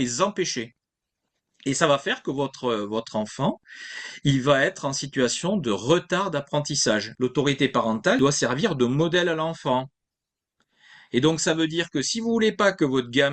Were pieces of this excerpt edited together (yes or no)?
yes